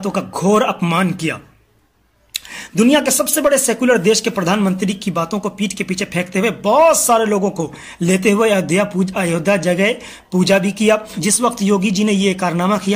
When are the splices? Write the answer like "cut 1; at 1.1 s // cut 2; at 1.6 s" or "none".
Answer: cut 1; at 11.1 s